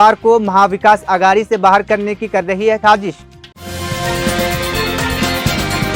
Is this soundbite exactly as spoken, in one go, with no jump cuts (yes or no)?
yes